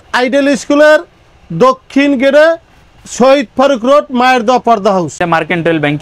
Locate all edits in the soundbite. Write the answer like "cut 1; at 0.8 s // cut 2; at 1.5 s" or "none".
none

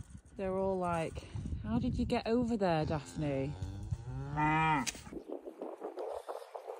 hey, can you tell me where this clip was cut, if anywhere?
cut 1; at 5.0 s

